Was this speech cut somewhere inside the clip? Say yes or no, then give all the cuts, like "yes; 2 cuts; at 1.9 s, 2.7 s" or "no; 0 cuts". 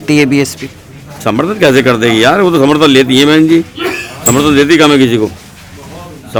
no; 0 cuts